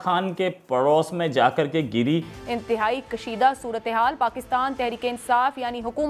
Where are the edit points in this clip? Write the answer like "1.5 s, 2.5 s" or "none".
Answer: 2.4 s